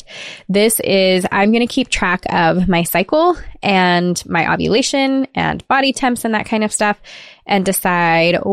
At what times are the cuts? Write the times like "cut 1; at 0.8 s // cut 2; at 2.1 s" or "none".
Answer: none